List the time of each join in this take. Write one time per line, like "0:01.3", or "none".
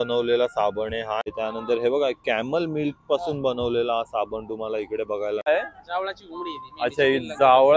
0:01.2
0:05.5